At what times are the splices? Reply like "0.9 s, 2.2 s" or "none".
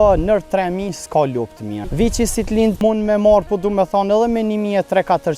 1.9 s, 2.8 s

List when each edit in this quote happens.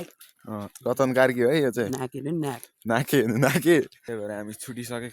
3.9 s

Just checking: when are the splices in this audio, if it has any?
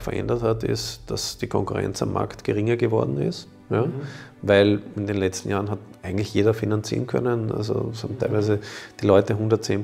none

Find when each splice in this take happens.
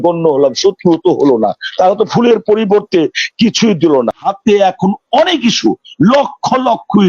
4.3 s

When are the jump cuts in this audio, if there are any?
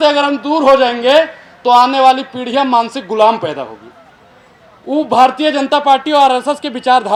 none

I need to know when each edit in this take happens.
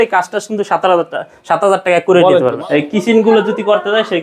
2.6 s

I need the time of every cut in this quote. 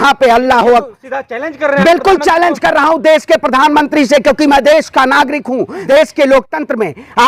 5.8 s

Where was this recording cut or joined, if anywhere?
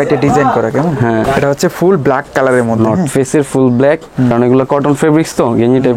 1.2 s, 4.3 s

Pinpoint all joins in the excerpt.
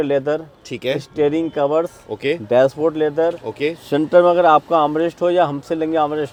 none

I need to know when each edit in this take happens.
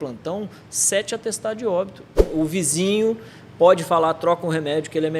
2.2 s

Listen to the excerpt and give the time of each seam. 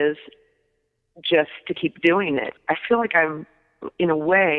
2.5 s

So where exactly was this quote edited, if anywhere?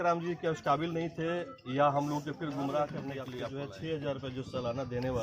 3.5 s

